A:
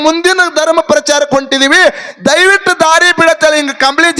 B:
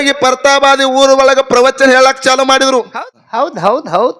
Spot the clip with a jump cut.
B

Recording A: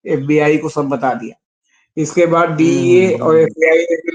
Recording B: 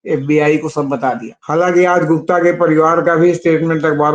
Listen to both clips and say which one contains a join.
B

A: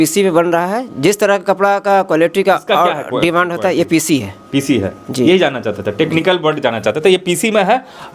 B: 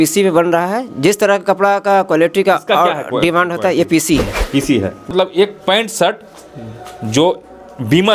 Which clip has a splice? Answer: B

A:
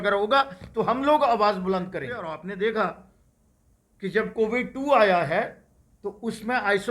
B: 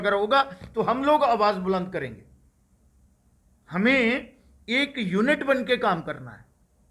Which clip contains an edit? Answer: A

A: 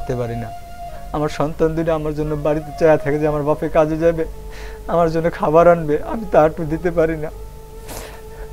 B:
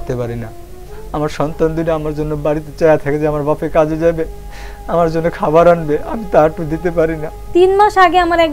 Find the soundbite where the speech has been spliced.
B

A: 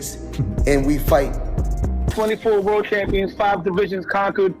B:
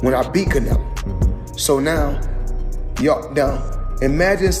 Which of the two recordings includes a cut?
A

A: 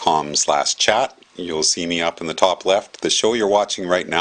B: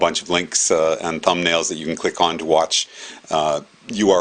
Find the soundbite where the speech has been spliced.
A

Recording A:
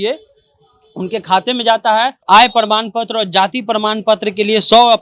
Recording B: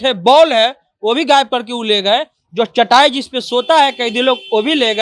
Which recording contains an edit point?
A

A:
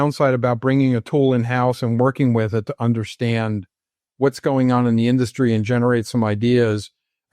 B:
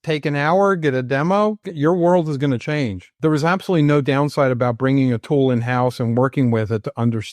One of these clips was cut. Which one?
B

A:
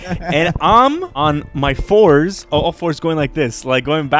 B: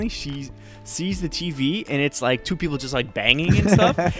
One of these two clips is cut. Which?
A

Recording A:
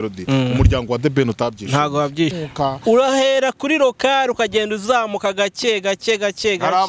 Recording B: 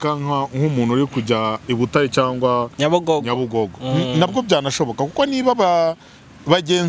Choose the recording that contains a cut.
A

